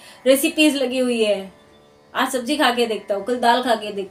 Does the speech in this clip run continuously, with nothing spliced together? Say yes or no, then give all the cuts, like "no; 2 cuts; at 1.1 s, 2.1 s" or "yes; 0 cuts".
yes; 0 cuts